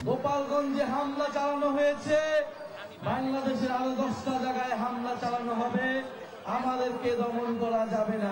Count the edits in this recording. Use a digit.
0